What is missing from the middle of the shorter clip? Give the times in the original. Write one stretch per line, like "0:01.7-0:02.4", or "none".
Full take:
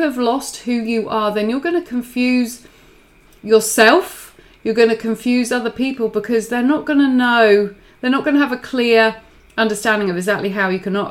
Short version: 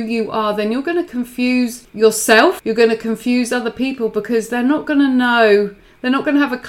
0:02.6-0:03.3
0:04.1-0:04.6